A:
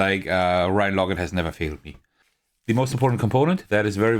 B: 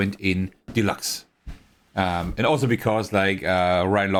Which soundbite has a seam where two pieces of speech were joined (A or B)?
A